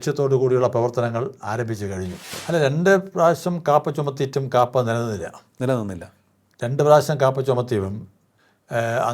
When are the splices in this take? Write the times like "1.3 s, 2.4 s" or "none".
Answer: 2.3 s